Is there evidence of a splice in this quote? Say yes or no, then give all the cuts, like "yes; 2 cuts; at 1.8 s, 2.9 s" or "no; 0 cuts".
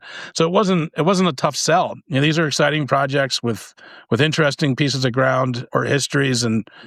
yes; 2 cuts; at 2.0 s, 5.6 s